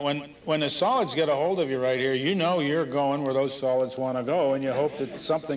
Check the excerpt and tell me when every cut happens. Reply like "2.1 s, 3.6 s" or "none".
3.1 s